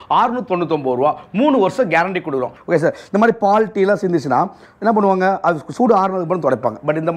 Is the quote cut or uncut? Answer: cut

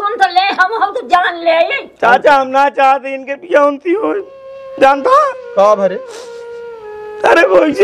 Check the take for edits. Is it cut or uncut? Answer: uncut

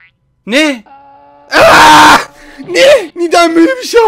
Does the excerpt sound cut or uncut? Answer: cut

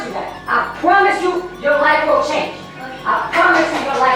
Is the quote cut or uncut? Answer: uncut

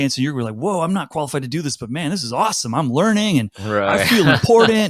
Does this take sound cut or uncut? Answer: uncut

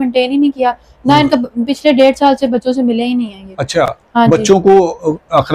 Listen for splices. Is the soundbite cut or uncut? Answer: uncut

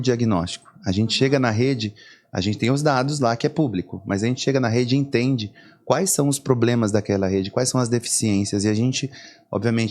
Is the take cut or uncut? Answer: uncut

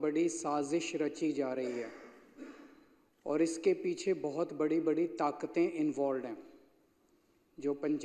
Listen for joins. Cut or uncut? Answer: uncut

